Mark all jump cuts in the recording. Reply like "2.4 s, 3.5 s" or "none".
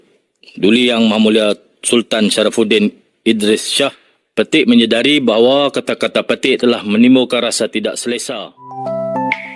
4.0 s, 8.7 s